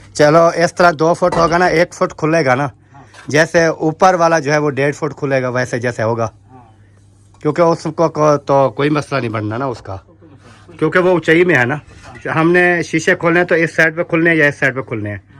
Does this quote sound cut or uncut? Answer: uncut